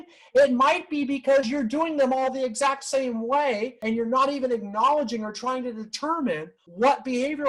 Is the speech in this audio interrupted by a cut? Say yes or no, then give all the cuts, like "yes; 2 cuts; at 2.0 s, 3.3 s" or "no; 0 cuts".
yes; 2 cuts; at 3.7 s, 6.6 s